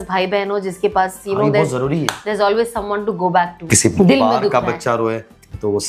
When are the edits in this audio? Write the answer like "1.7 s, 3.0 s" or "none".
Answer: 3.9 s

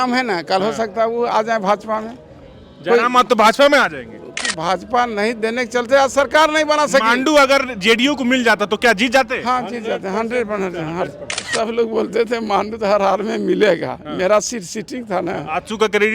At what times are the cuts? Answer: 4.4 s, 11.5 s

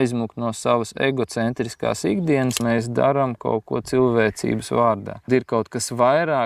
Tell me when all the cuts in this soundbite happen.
2.6 s, 5.3 s

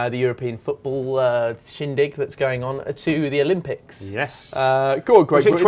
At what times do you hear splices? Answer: 3.7 s

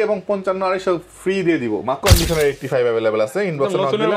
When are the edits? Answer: 2.0 s

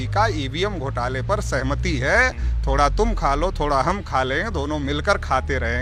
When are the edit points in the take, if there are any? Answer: none

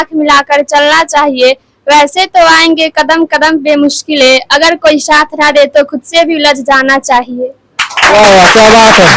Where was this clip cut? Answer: none

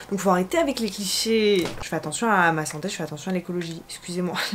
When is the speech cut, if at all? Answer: 1.7 s

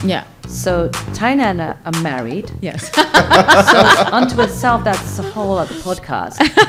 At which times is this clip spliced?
none

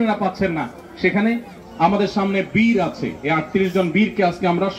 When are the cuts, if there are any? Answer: 1.5 s

